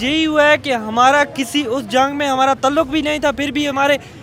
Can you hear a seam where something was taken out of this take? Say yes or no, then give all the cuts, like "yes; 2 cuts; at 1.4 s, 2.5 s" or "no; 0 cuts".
no; 0 cuts